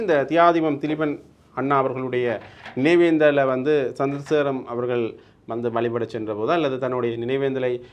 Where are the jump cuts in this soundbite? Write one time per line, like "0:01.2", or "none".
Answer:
none